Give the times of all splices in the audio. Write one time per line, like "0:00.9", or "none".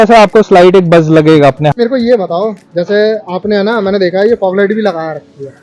0:01.7